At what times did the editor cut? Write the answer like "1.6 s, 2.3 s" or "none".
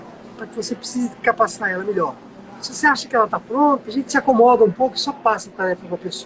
3.9 s